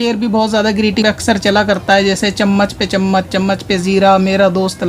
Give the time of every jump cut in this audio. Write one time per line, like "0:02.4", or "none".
0:01.0